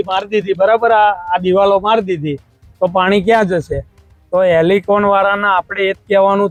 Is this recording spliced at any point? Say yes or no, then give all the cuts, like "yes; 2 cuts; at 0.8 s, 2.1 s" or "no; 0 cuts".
no; 0 cuts